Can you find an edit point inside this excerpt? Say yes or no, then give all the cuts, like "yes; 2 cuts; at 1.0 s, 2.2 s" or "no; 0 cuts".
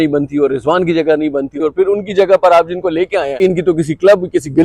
yes; 2 cuts; at 1.5 s, 3.4 s